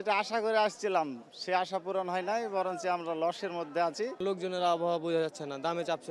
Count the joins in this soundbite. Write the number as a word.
zero